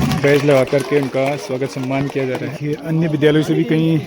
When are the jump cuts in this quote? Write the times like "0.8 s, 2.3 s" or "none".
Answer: 2.6 s